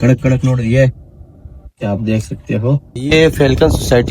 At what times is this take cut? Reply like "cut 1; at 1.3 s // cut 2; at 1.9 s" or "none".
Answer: cut 1; at 3.0 s